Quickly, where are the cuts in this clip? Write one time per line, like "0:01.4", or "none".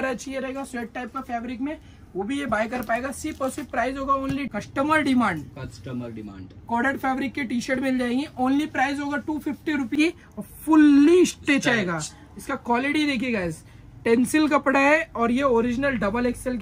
0:04.5
0:10.0